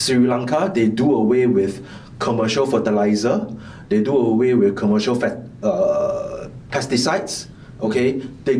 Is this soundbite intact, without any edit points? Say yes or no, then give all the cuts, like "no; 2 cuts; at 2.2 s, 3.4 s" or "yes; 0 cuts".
yes; 0 cuts